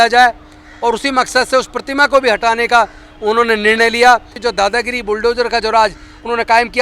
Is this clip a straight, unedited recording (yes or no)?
no